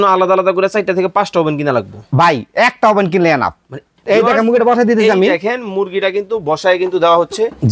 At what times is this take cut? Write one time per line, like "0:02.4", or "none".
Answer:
0:03.9